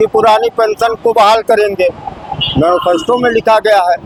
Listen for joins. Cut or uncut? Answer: uncut